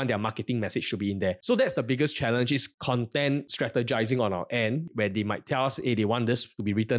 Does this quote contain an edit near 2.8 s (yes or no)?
yes